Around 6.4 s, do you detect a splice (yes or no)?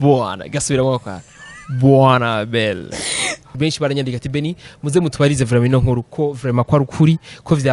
no